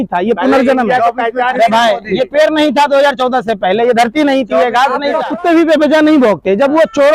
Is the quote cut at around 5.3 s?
yes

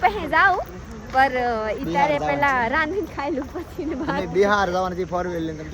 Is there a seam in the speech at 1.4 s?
no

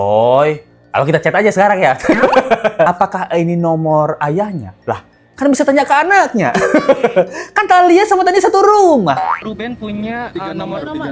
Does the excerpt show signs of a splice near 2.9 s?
yes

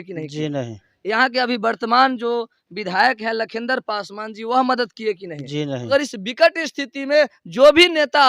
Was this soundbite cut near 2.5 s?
no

